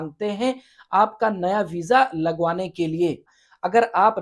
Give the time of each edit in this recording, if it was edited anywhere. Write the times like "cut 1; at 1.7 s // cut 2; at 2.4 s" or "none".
cut 1; at 3.2 s